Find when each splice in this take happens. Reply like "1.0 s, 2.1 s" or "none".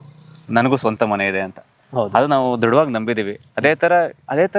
none